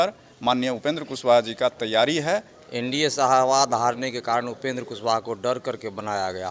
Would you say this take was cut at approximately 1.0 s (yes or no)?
no